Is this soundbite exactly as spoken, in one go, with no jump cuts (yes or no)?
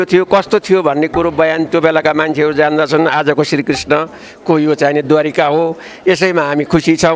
yes